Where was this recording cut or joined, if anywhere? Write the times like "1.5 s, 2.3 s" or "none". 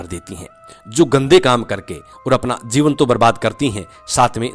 none

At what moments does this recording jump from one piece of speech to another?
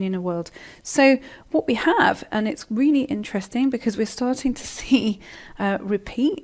1.7 s

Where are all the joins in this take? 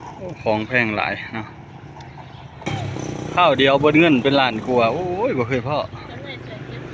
2.7 s

